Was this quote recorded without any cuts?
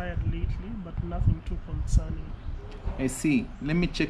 no; 1 cut; at 2.5 s

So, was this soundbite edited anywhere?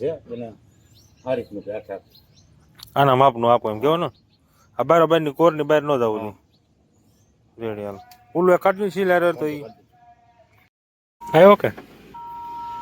yes; 1 cut; at 10.8 s

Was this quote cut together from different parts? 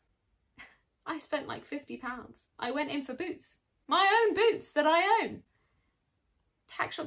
no; 0 cuts

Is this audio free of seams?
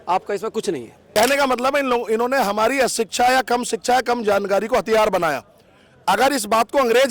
no; 1 cut; at 0.9 s

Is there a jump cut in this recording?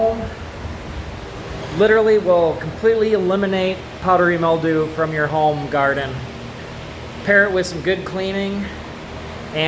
no; 0 cuts

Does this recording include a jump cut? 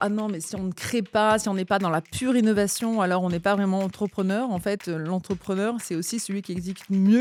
no; 0 cuts

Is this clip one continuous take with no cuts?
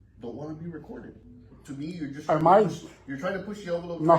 no; 1 cut; at 1.6 s

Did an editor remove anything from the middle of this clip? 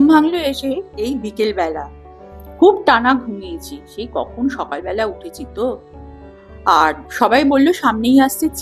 no; 0 cuts

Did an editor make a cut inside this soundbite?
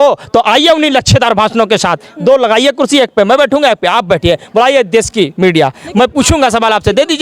no; 0 cuts

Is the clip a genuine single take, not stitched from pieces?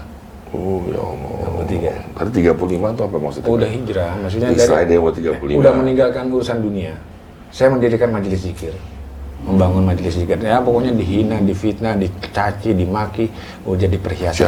yes; 0 cuts

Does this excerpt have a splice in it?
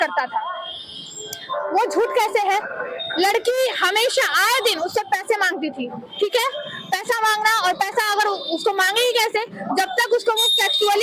no; 0 cuts

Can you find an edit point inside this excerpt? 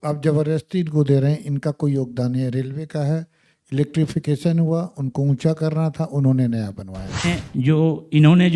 yes; 1 cut; at 7.2 s

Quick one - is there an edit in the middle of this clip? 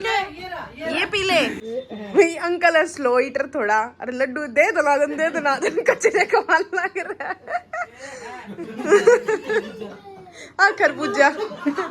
yes; 1 cut; at 1.7 s

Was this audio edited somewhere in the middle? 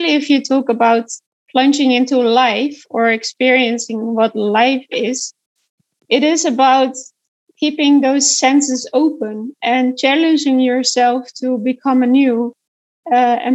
yes; 2 cuts; at 1.2 s, 5.8 s

